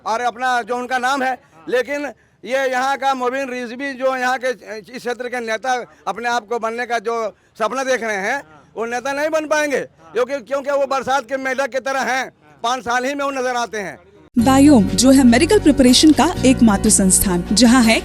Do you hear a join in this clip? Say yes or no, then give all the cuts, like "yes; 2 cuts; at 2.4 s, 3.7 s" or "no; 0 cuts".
no; 0 cuts